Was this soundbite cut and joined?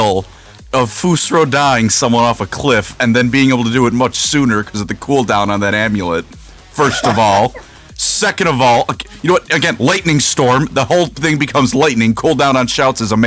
no; 0 cuts

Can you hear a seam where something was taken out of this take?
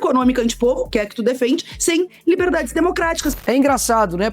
yes; 1 cut; at 3.2 s

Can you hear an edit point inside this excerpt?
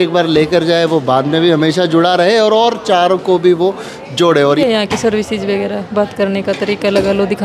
yes; 1 cut; at 4.6 s

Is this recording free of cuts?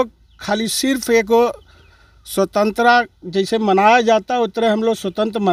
yes; 0 cuts

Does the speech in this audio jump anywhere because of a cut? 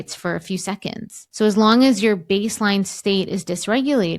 yes; 1 cut; at 1.2 s

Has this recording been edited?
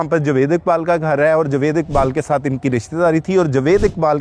no; 0 cuts

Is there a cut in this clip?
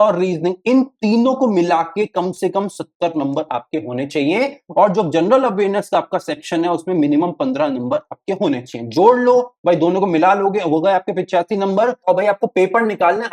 no; 0 cuts

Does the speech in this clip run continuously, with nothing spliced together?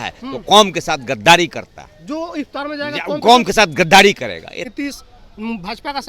no; 1 cut; at 4.7 s

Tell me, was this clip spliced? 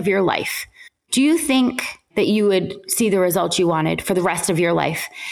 no; 0 cuts

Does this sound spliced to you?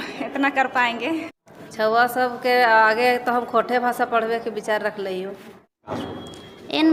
yes; 2 cuts; at 1.4 s, 5.6 s

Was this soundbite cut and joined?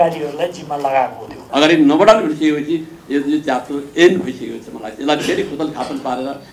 yes; 1 cut; at 1.4 s

